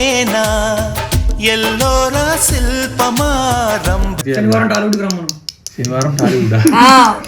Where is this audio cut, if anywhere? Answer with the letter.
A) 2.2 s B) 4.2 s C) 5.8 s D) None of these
B